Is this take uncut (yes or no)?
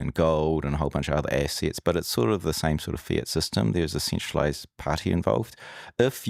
yes